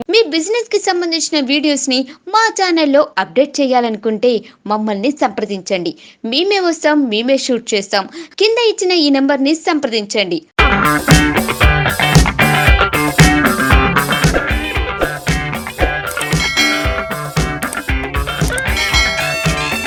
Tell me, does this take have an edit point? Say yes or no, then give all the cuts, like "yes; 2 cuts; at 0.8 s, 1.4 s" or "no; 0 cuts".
no; 0 cuts